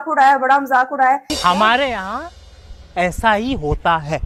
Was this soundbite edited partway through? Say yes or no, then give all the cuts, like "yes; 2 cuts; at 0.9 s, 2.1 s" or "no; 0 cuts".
no; 0 cuts